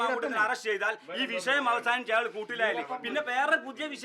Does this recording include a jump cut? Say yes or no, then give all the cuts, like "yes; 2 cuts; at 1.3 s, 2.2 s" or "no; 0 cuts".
no; 0 cuts